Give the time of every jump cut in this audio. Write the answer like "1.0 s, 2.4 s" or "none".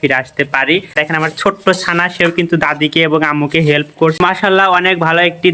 0.9 s, 4.2 s

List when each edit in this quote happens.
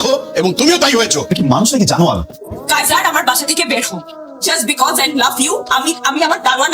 2.6 s

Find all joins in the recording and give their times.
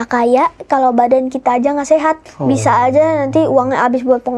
none

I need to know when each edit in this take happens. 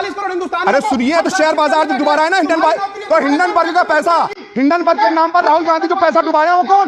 none

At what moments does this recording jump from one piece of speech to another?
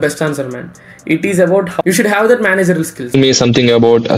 1.8 s, 3.1 s

